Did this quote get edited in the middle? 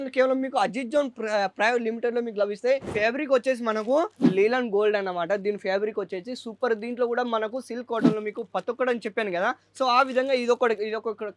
yes; 1 cut; at 2.9 s

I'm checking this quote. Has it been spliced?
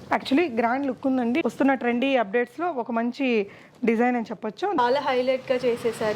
yes; 2 cuts; at 1.4 s, 4.8 s

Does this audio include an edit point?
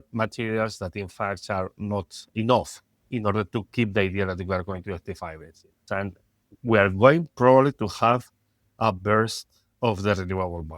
yes; 2 cuts; at 2.2 s, 5.8 s

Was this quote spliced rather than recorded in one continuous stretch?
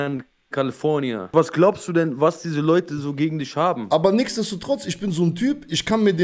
yes; 2 cuts; at 1.3 s, 3.8 s

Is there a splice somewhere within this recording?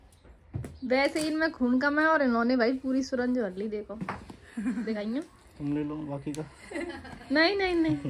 no; 0 cuts

